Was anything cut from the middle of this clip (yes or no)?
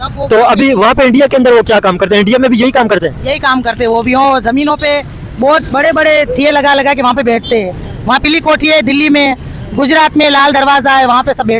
no